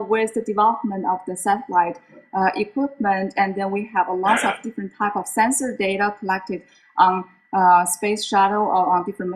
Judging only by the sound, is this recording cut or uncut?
uncut